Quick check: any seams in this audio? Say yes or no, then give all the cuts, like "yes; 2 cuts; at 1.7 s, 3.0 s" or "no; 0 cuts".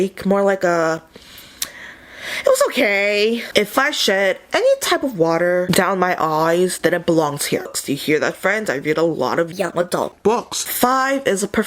yes; 3 cuts; at 3.4 s, 7.7 s, 10.5 s